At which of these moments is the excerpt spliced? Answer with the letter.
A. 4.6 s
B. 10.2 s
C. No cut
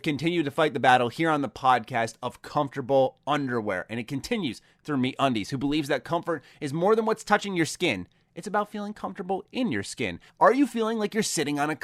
B